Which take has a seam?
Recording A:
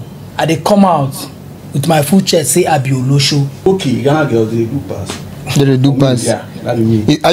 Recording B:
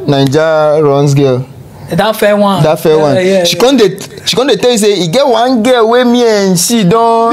A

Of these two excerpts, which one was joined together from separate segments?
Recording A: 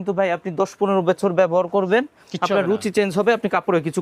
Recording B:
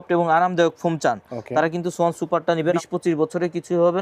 B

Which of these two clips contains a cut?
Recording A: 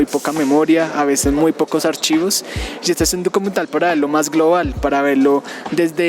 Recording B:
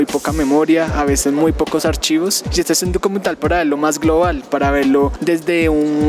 B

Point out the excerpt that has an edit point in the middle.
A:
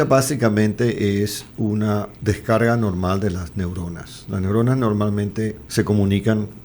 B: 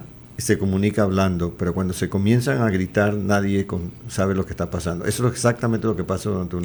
A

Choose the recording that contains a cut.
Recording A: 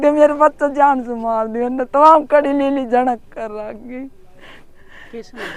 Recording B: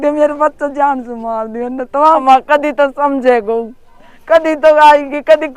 B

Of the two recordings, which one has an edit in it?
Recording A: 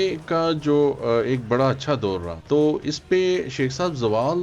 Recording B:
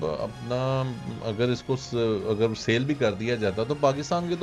A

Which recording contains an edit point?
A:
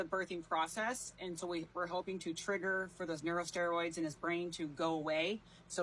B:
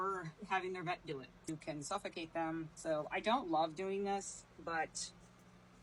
B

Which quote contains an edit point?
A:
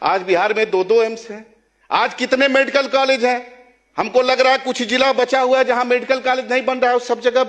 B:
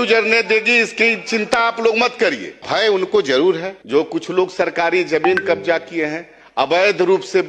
B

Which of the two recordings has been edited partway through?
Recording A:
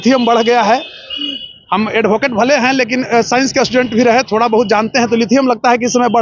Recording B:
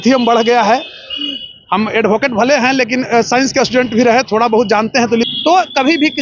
B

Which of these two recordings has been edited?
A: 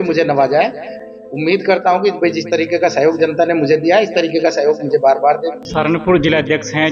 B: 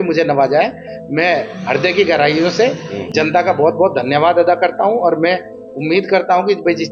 A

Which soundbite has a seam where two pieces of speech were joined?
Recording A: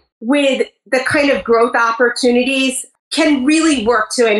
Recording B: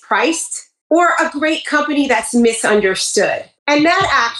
A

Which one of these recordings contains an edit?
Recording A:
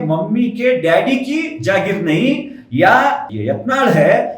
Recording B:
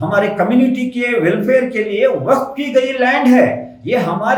A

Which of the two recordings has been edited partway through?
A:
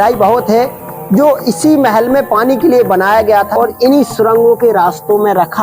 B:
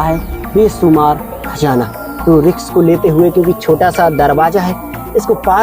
A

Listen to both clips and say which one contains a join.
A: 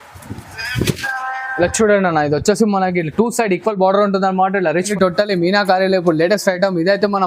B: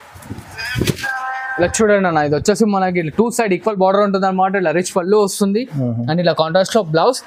A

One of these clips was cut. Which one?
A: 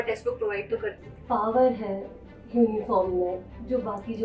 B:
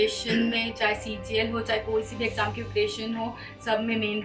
A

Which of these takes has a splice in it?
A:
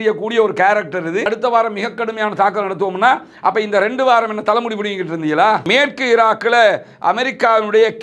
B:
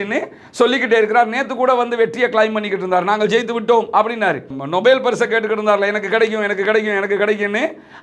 A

